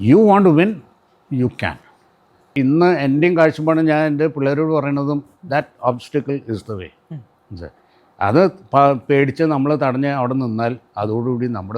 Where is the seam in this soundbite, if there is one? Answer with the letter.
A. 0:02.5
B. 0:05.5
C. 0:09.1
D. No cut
A